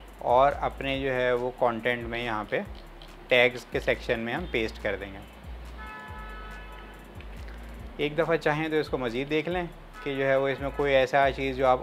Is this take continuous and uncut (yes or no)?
yes